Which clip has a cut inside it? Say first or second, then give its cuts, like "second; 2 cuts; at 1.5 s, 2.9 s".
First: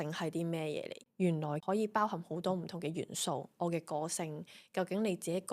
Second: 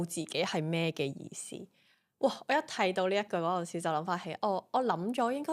first; 1 cut; at 1.0 s